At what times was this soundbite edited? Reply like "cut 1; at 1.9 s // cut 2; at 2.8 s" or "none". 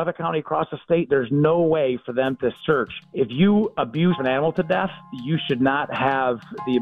cut 1; at 3.0 s // cut 2; at 4.2 s

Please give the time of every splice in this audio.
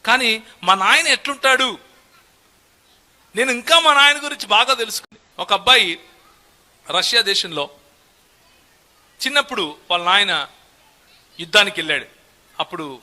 cut 1; at 5.0 s

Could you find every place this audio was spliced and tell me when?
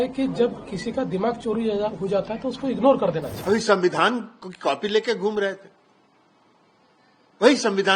cut 1; at 3.3 s

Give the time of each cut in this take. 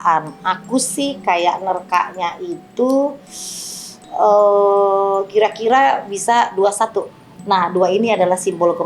cut 1; at 7.4 s

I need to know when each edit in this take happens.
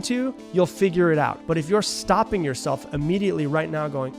cut 1; at 1.4 s

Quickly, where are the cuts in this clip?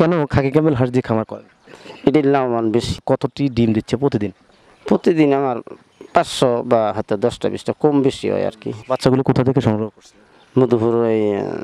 cut 1; at 3.0 s // cut 2; at 8.8 s

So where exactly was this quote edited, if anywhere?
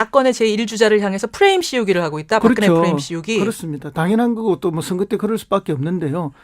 cut 1; at 3.6 s

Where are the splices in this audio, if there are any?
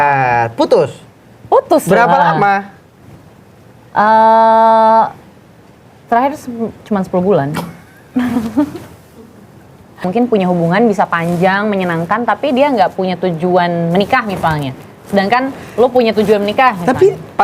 cut 1; at 10.0 s

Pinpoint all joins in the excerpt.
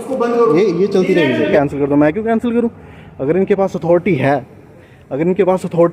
cut 1; at 1.5 s

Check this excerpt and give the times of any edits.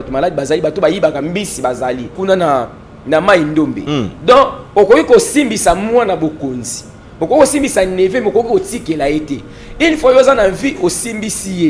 cut 1; at 2.2 s

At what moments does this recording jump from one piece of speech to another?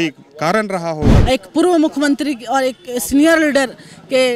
cut 1; at 1.2 s

